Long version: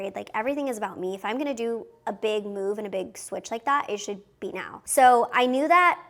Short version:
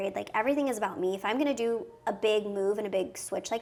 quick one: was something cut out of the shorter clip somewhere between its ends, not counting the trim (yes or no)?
no